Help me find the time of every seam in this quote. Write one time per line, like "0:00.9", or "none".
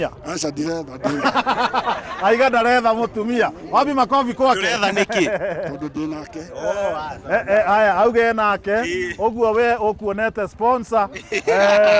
none